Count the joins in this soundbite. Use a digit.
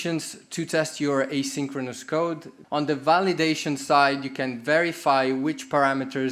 1